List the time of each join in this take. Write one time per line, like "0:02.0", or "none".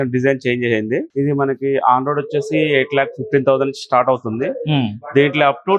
0:01.1